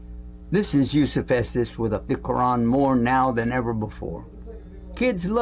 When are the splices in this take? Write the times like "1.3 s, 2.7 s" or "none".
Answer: 2.0 s